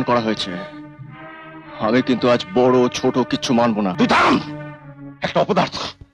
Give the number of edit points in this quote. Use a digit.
1